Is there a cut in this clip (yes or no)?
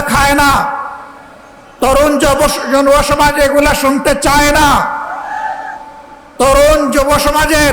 no